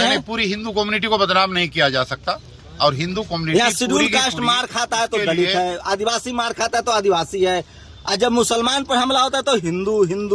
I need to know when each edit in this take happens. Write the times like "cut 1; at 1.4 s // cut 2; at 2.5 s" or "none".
none